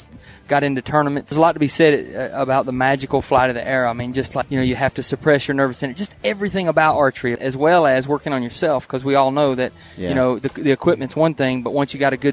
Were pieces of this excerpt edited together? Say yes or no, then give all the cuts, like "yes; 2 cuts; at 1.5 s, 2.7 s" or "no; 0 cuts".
yes; 3 cuts; at 1.3 s, 4.4 s, 7.4 s